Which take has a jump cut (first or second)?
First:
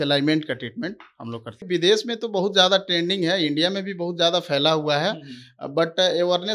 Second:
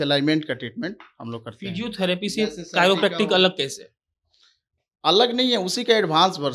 first